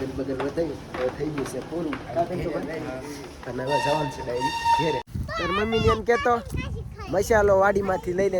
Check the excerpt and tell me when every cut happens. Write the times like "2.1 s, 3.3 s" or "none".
5.1 s